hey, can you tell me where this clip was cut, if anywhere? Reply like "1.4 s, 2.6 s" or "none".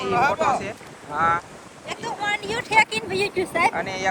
none